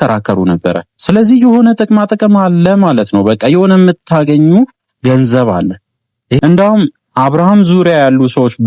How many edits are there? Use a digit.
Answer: 1